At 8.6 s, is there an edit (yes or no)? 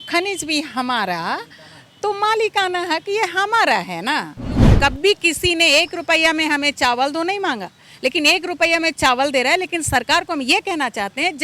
no